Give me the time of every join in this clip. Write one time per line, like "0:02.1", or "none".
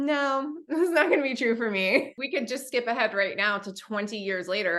0:02.2